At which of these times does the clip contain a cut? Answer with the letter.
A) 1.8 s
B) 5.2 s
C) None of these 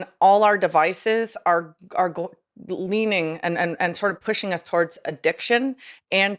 C